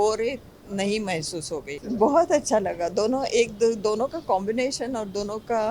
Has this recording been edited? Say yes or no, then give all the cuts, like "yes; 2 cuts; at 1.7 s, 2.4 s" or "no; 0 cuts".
no; 0 cuts